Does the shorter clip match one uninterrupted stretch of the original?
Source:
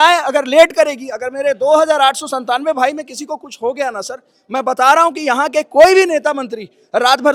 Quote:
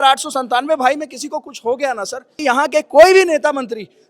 no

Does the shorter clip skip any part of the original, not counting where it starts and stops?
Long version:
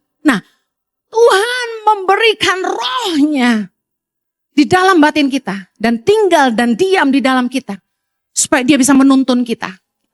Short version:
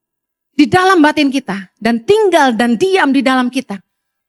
no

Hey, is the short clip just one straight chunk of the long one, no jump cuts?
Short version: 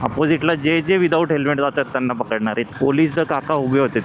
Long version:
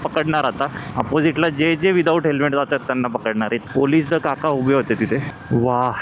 yes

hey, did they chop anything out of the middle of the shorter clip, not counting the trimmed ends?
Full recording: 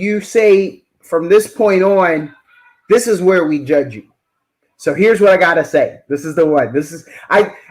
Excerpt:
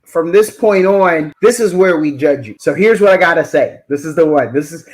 yes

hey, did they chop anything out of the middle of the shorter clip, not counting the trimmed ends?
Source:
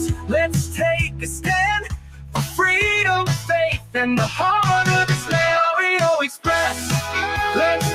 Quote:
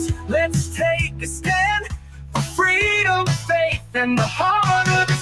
no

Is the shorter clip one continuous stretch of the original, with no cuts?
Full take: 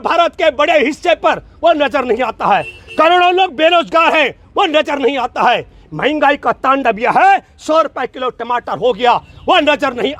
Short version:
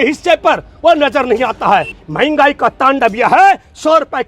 no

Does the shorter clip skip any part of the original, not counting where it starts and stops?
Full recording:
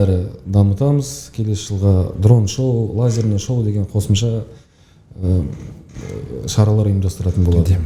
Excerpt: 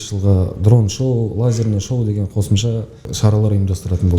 yes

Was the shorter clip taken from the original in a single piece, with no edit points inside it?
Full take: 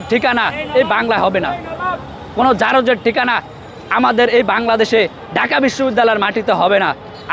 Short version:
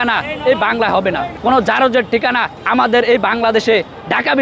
no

